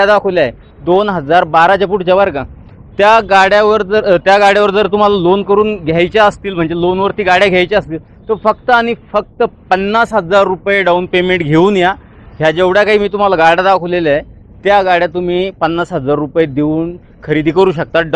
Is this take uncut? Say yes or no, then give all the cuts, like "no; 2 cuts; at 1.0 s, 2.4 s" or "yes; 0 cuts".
yes; 0 cuts